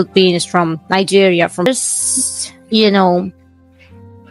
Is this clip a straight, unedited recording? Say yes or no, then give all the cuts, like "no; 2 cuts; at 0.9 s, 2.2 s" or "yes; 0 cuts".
no; 1 cut; at 1.7 s